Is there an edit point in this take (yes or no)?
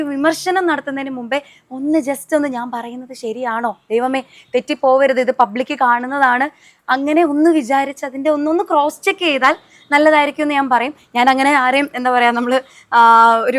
no